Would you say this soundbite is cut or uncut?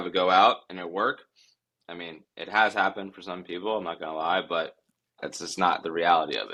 uncut